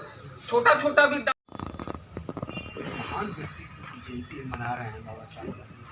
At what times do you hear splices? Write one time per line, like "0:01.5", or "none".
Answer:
0:01.5